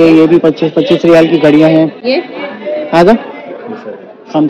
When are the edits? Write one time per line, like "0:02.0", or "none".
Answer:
none